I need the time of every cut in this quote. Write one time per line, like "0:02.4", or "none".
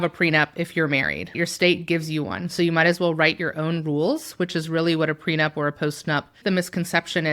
0:01.4
0:06.4